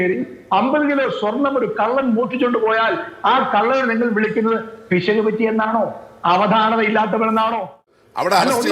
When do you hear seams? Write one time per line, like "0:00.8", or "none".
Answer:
0:07.8